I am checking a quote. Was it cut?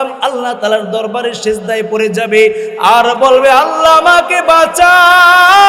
no; 0 cuts

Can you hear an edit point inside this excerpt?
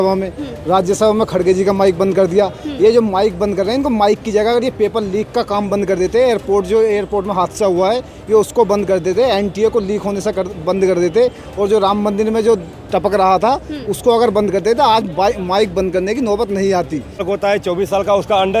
yes; 1 cut; at 17.2 s

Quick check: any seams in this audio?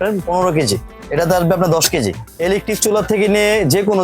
yes; 2 cuts; at 1.0 s, 2.2 s

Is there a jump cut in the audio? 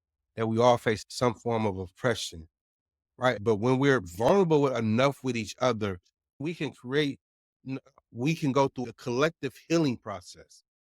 yes; 2 cuts; at 6.4 s, 8.9 s

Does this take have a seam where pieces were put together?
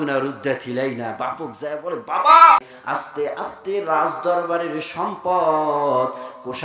yes; 1 cut; at 2.6 s

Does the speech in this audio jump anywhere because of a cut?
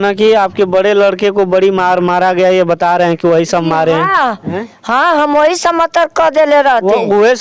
no; 0 cuts

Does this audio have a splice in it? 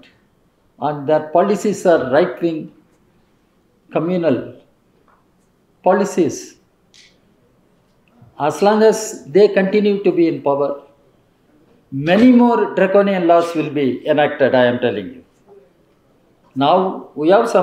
no; 0 cuts

